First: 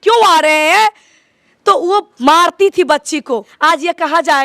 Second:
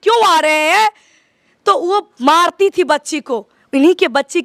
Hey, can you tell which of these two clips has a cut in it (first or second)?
first